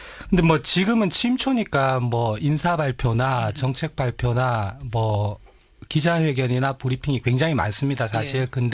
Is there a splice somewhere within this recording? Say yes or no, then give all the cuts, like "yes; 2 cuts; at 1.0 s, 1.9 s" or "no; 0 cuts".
yes; 1 cut; at 3.0 s